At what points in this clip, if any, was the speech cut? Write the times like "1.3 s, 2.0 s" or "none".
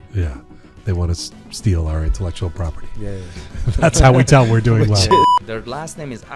5.4 s